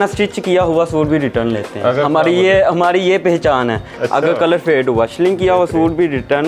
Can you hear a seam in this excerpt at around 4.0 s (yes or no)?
yes